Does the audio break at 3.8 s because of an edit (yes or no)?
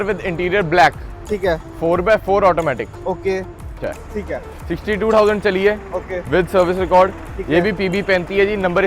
yes